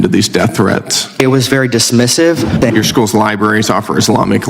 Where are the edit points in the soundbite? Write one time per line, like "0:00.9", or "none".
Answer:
0:01.2
0:02.7